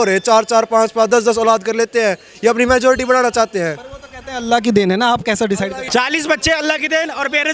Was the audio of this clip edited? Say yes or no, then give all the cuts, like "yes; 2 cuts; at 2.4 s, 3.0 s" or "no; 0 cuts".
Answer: no; 0 cuts